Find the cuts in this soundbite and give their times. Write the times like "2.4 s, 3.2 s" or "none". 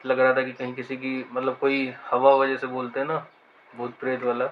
none